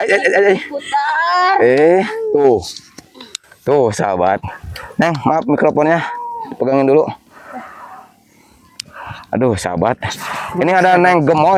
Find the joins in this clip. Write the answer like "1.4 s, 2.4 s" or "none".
none